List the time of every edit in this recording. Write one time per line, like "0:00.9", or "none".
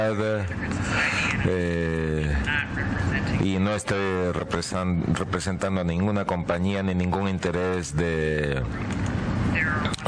0:01.3